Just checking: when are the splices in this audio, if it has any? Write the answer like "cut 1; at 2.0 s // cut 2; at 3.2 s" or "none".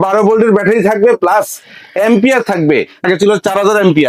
cut 1; at 3.0 s